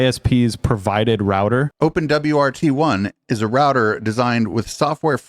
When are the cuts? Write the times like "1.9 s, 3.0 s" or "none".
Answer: 1.7 s